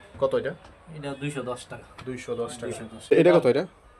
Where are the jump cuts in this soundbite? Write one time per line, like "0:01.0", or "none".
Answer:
0:03.1